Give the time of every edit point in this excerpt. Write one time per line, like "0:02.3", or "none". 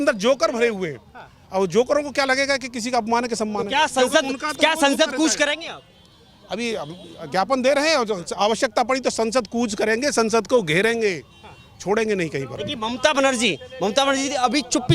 none